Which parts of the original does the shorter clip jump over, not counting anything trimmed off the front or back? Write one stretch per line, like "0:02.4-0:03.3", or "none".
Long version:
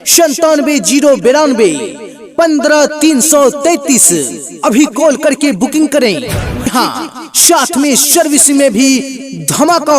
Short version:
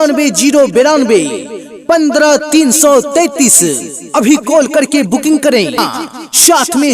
0:06.3-0:06.8